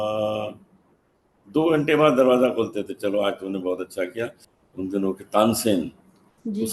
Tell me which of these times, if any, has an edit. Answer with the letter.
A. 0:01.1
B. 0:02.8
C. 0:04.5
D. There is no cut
C